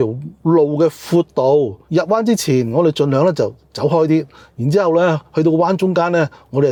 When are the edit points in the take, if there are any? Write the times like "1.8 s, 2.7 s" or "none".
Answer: none